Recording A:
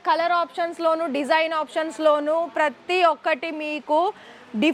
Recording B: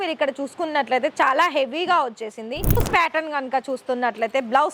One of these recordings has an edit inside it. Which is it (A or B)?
B